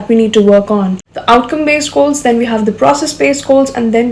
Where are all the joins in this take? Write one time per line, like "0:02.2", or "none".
0:01.1